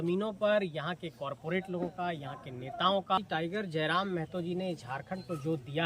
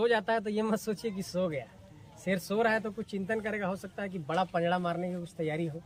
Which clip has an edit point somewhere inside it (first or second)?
first